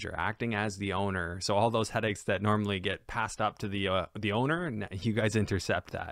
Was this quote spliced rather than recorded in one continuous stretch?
no; 0 cuts

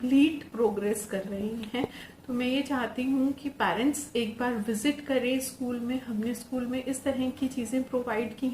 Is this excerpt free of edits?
no; 1 cut; at 2.0 s

